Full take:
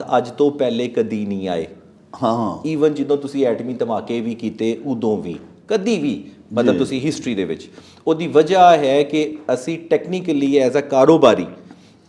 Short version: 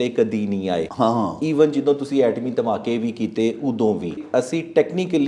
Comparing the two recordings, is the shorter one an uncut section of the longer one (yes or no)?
no